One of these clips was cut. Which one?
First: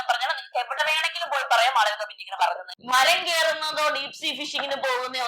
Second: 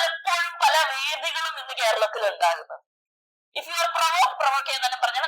first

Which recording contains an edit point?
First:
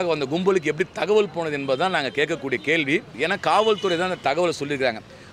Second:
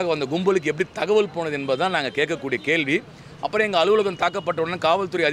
first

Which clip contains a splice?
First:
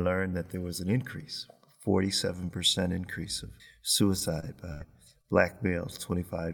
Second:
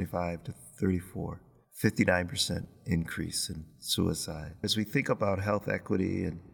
second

